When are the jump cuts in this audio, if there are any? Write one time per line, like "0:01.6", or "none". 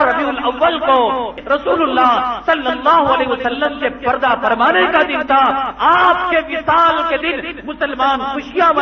0:01.4